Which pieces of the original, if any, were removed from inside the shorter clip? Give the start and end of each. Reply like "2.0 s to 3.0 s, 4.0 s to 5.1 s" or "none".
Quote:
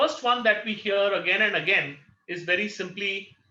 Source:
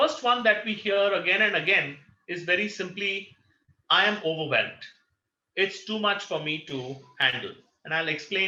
none